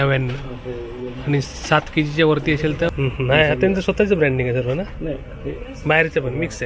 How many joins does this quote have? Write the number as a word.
one